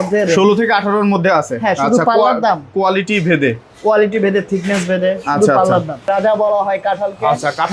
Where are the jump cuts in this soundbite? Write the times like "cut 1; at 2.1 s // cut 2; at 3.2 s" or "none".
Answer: cut 1; at 6.1 s